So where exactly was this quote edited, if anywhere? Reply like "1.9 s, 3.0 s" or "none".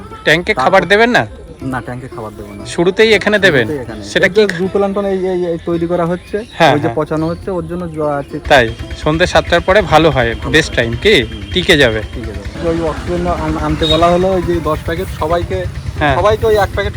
8.3 s, 12.6 s